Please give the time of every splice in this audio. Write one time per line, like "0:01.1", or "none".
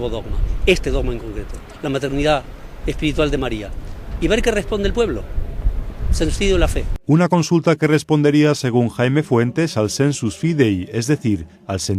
0:06.9